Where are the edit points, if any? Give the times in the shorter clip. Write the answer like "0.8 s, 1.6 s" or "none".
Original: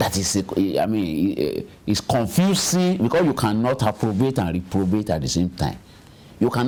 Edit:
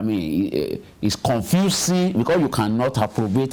none